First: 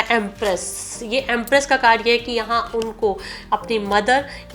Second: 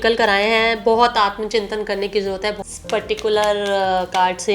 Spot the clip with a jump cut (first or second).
second